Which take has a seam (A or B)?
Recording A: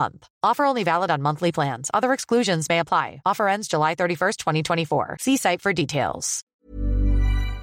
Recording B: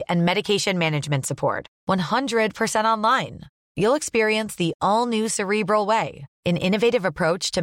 A